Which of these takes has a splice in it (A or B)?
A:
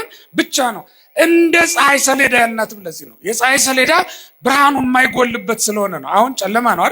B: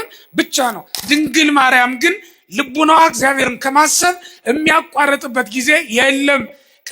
B